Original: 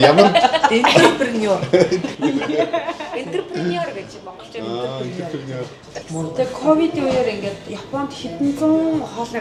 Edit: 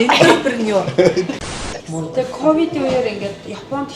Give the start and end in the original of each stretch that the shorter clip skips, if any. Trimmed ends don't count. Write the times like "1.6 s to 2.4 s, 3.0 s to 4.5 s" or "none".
2.1 s to 5.6 s